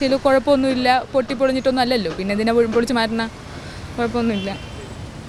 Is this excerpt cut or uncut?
uncut